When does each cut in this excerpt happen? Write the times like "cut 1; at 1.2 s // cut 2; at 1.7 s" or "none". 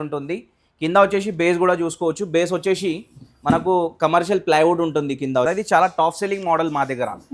cut 1; at 5.5 s